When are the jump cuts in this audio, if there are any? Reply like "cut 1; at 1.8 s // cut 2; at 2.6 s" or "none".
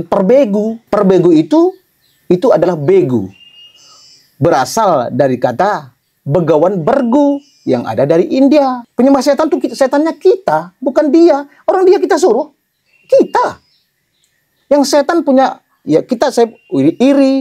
cut 1; at 0.8 s // cut 2; at 8.8 s